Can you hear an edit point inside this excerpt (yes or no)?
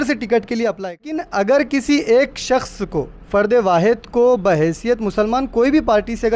yes